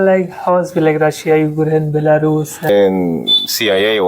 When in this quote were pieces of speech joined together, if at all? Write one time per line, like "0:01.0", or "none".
0:02.7